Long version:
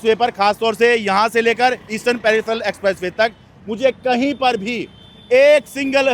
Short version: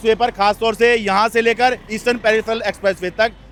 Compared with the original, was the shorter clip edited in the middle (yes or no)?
no